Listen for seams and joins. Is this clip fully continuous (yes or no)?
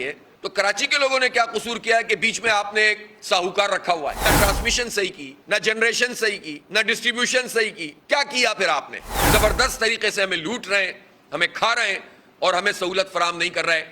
no